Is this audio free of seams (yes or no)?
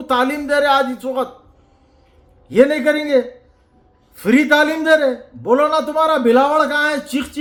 yes